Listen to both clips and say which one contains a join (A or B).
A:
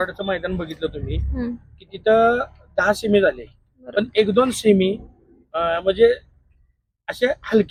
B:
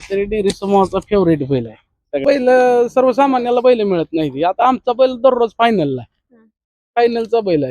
B